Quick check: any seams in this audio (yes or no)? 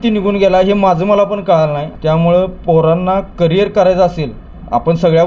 yes